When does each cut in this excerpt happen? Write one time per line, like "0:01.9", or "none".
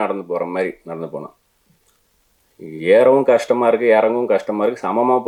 none